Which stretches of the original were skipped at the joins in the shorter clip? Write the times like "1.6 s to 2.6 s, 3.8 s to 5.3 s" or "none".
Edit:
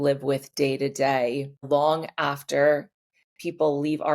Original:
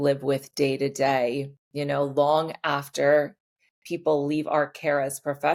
1.6 s to 2.1 s